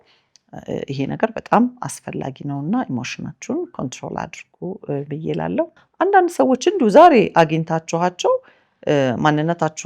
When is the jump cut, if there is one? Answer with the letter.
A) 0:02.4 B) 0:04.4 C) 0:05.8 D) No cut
C